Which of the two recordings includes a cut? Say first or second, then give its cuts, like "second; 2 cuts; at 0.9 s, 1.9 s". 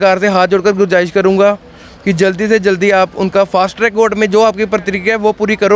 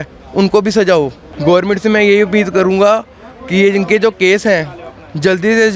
second; 1 cut; at 1.2 s